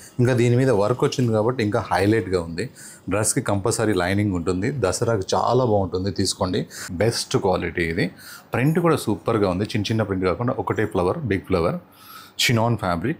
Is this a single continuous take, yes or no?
no